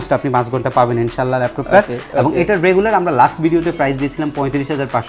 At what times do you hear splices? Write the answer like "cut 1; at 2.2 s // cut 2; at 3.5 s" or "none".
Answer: none

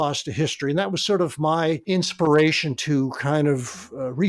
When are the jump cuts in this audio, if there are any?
cut 1; at 1.8 s // cut 2; at 2.8 s

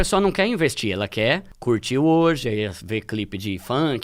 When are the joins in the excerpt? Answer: cut 1; at 1.5 s

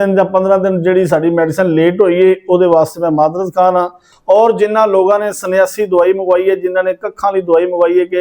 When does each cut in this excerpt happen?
cut 1; at 4.1 s

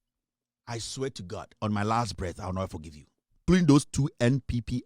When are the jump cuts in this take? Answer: cut 1; at 3.4 s

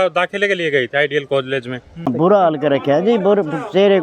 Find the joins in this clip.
cut 1; at 2.1 s

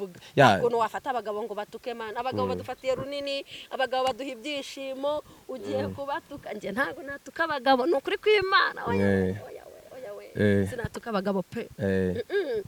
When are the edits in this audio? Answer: none

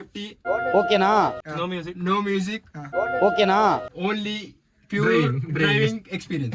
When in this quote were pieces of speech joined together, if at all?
none

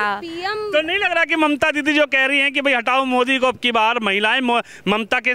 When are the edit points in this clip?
none

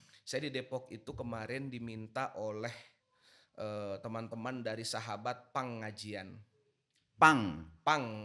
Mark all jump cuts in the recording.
none

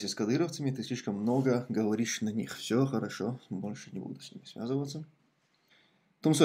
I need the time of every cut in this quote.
none

